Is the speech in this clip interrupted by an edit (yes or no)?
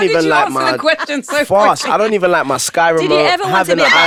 no